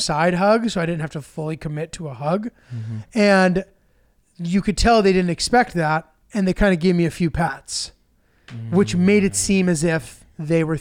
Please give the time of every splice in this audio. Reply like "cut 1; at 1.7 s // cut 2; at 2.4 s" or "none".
none